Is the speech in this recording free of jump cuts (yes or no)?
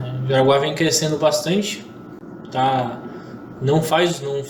yes